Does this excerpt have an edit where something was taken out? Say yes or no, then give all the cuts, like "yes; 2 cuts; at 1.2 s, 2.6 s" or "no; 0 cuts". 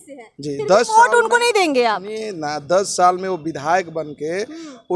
no; 0 cuts